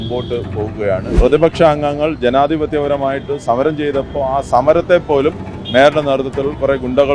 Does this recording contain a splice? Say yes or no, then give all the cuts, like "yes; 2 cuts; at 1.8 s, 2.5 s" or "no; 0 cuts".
yes; 1 cut; at 1.1 s